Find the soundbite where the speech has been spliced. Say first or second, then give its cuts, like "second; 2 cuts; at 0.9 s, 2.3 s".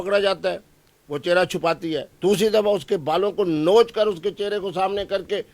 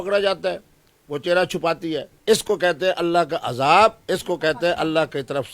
second; 1 cut; at 2.1 s